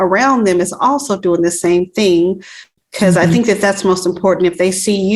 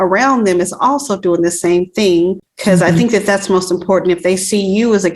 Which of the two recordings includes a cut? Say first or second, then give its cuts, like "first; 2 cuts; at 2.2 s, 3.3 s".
second; 1 cut; at 2.5 s